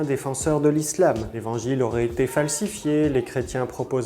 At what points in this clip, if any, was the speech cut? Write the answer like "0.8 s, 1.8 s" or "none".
1.3 s